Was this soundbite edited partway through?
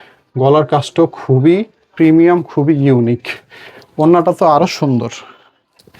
no; 0 cuts

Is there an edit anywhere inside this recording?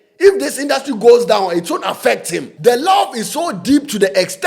yes; 1 cut; at 2.5 s

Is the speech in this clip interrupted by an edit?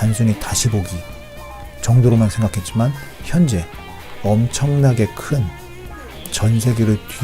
no; 0 cuts

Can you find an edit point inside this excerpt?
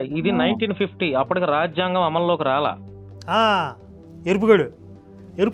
no; 0 cuts

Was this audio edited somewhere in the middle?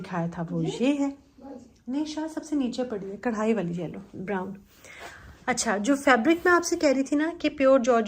no; 0 cuts

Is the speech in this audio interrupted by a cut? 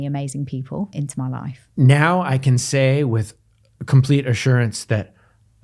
yes; 1 cut; at 1.0 s

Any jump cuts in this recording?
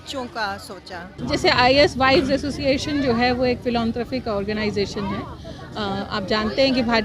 yes; 1 cut; at 1.1 s

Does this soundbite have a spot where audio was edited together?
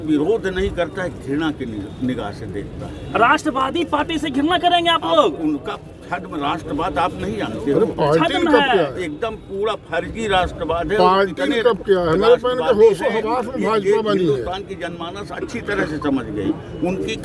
no; 0 cuts

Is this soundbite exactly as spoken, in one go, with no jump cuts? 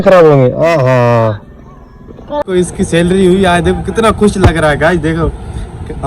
no; 1 cut; at 2.4 s

